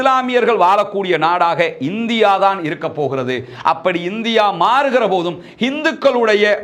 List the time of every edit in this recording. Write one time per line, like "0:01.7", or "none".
none